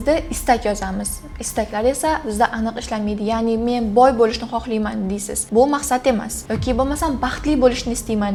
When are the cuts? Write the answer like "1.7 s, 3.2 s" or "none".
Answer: none